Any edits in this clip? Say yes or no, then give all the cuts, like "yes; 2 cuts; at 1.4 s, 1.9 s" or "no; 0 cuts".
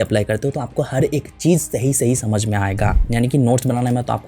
yes; 1 cut; at 2.9 s